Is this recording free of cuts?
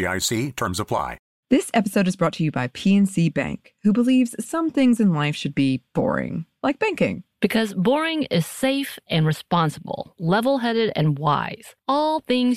no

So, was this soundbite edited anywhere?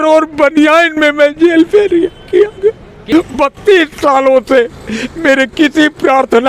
yes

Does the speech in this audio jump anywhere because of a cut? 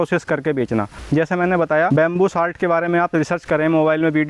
yes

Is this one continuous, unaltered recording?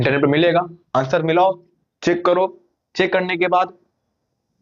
yes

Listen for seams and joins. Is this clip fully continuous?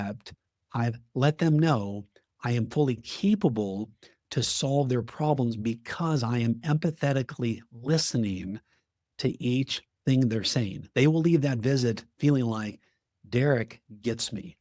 yes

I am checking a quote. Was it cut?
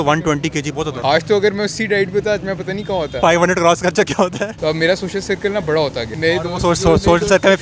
yes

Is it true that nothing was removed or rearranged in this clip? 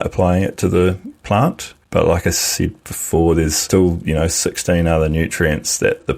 no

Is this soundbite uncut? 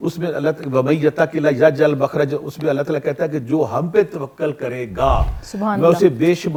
yes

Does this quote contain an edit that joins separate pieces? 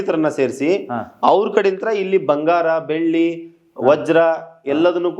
no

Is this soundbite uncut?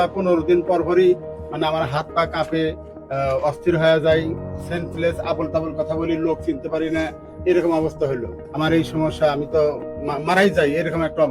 no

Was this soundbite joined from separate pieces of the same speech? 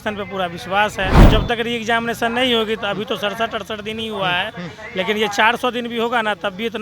yes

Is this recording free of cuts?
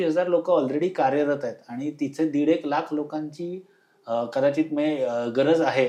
yes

